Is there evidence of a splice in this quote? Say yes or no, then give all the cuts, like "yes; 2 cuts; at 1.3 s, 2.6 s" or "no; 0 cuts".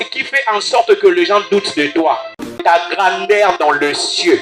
yes; 1 cut; at 2.6 s